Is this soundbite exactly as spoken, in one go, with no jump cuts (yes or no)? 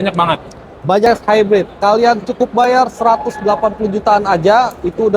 no